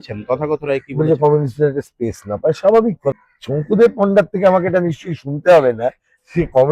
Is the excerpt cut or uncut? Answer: cut